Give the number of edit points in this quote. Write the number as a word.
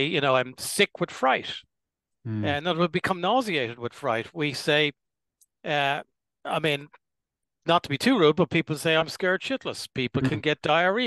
zero